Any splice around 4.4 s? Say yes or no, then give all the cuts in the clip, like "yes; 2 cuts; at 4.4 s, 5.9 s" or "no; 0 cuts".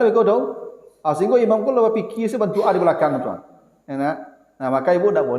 no; 0 cuts